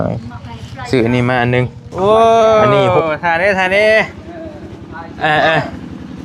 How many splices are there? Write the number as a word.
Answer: one